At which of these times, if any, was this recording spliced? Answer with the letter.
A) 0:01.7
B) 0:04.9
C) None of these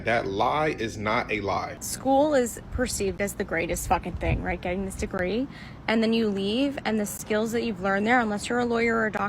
A